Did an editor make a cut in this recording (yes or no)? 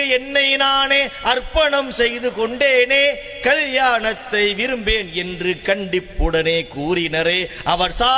no